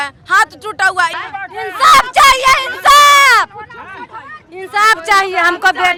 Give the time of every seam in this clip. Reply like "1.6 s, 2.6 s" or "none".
none